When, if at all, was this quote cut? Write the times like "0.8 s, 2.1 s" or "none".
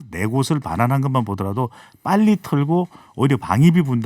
none